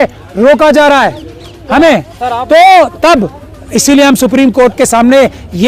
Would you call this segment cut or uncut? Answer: uncut